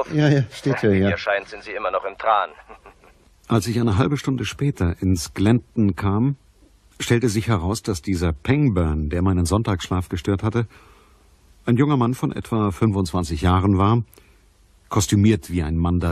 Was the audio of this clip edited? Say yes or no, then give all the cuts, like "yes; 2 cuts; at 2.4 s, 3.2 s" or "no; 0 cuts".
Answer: no; 0 cuts